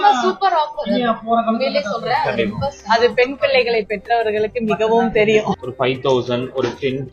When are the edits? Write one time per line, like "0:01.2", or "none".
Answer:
0:05.6